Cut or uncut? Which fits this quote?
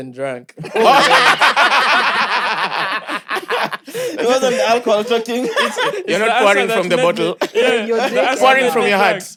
uncut